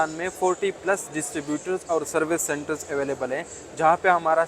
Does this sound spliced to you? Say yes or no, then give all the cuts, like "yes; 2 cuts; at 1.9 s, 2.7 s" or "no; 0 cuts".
no; 0 cuts